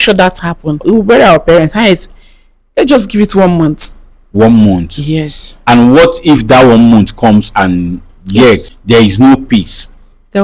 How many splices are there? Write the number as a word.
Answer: two